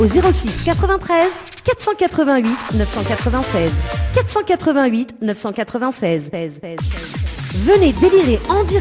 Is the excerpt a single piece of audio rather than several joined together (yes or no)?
yes